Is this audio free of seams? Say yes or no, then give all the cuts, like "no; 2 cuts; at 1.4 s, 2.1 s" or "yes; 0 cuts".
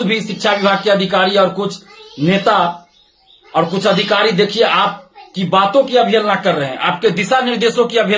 yes; 0 cuts